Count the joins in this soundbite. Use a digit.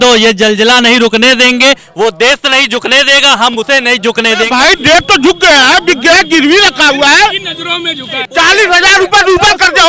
2